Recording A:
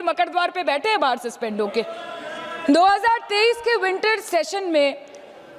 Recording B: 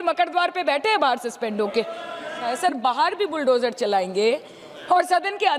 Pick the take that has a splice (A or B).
B